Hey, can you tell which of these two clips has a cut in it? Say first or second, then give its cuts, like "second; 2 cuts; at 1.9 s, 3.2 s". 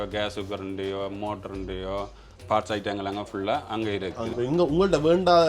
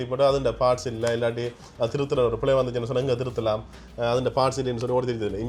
first; 2 cuts; at 2.4 s, 4.3 s